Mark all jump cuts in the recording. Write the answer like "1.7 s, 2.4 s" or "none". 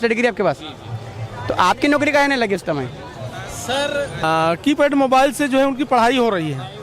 4.2 s